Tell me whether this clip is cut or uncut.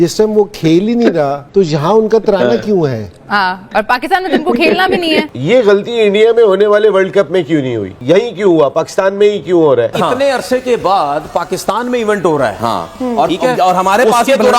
cut